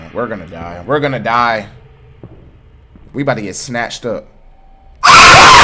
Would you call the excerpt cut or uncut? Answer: uncut